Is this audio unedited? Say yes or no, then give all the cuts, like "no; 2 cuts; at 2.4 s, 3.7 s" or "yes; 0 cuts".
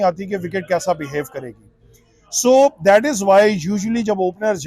yes; 0 cuts